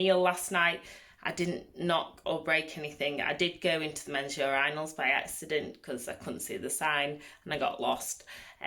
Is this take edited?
no; 0 cuts

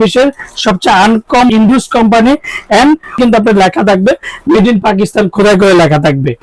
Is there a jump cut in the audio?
yes; 2 cuts; at 1.5 s, 3.2 s

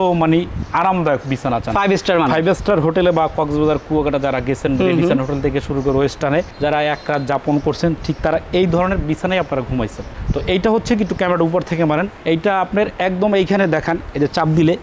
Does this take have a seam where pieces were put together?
no; 0 cuts

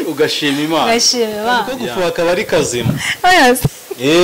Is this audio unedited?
no; 1 cut; at 1.8 s

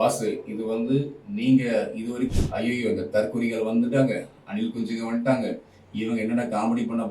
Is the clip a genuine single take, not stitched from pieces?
no; 1 cut; at 2.3 s

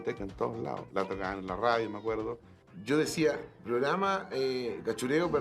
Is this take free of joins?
no; 1 cut; at 2.4 s

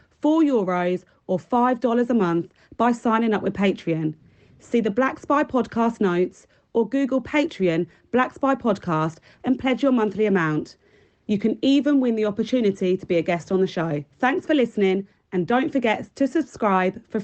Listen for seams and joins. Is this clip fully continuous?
no; 1 cut; at 14.0 s

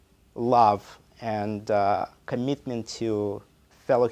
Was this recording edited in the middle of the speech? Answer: no; 0 cuts

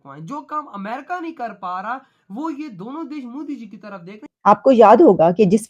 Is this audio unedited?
no; 1 cut; at 4.3 s

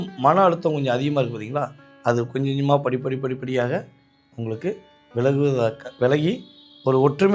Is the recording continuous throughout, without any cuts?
yes; 0 cuts

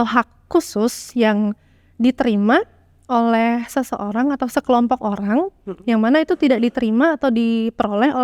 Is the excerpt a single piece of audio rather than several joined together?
yes; 0 cuts

